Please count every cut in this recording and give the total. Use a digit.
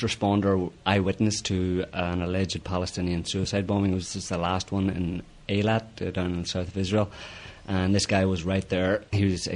1